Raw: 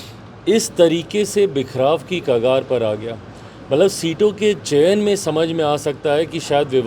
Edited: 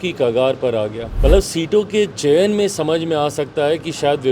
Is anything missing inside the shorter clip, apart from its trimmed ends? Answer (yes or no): yes